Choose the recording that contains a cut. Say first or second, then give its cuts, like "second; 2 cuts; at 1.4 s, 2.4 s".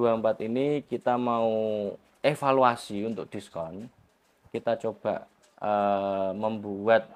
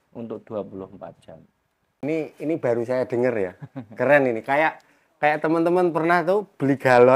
second; 1 cut; at 2.0 s